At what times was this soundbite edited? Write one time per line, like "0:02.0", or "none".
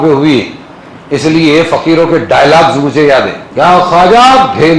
0:03.4